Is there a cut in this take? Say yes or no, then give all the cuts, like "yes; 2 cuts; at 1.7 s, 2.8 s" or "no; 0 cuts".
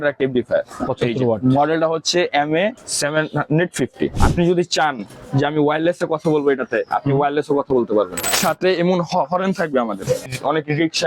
yes; 4 cuts; at 2.9 s, 4.2 s, 8.4 s, 10.3 s